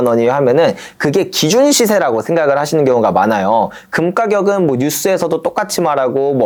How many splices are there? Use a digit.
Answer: 0